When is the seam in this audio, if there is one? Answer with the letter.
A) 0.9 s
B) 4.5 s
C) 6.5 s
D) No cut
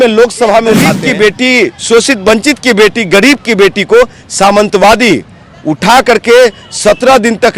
A